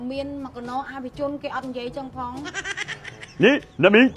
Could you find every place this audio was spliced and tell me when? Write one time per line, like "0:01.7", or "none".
none